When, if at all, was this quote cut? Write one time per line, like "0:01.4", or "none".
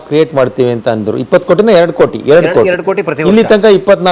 none